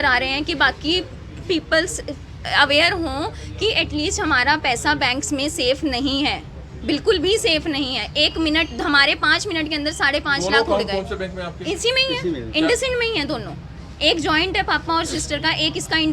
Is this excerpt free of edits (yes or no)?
yes